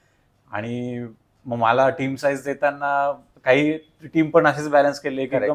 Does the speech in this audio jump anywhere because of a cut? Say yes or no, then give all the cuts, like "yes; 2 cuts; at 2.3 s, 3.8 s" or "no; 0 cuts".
no; 0 cuts